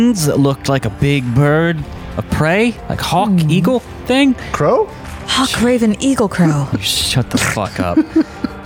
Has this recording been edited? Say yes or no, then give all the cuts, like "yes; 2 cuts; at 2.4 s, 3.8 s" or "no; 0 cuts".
no; 0 cuts